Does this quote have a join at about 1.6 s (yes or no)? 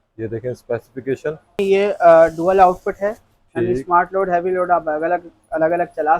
yes